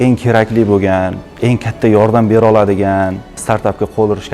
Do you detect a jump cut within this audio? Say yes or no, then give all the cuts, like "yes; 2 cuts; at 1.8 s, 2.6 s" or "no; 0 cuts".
yes; 1 cut; at 1.4 s